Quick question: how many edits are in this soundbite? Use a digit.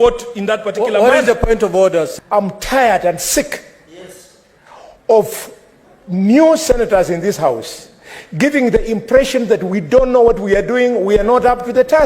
1